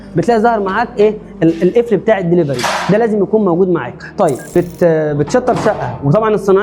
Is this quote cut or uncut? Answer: cut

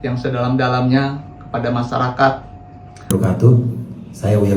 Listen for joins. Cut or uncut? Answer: cut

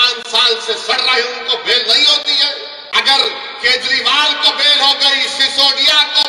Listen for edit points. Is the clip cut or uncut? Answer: cut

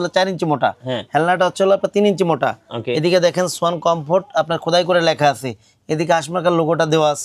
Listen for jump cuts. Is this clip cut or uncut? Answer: uncut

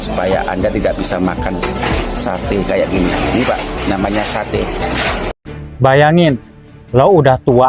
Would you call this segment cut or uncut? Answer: cut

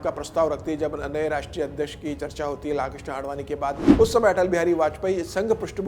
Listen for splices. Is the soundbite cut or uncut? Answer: cut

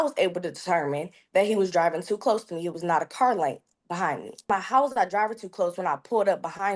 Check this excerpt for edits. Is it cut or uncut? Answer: cut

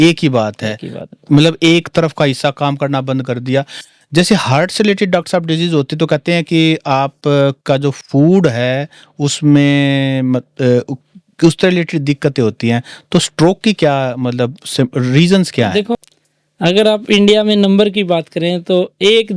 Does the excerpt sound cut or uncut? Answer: cut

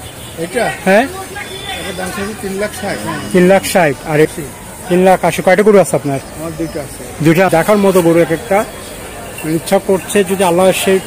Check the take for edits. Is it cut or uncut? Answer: cut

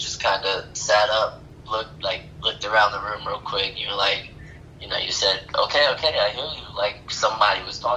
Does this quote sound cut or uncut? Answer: uncut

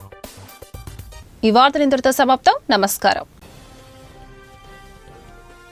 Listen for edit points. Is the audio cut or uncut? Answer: uncut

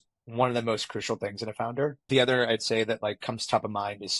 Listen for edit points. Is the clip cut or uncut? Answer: cut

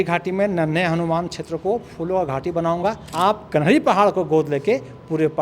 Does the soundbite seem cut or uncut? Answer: cut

